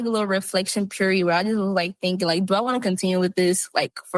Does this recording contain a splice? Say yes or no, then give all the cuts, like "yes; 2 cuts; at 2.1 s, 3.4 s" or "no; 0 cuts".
no; 0 cuts